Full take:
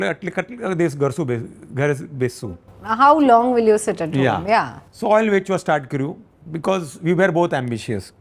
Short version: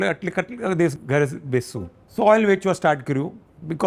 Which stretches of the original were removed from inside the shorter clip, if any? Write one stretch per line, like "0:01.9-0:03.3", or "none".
0:00.9-0:01.6
0:02.7-0:04.8